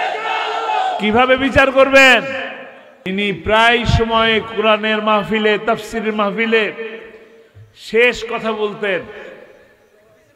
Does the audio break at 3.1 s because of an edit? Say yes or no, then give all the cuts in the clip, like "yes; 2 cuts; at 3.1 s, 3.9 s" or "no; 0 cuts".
yes; 1 cut; at 3.1 s